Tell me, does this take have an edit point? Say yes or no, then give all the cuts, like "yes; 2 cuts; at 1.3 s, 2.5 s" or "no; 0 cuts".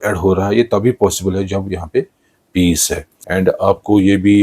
yes; 1 cut; at 3.5 s